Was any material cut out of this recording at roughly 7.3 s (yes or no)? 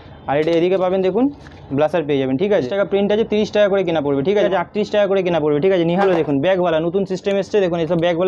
no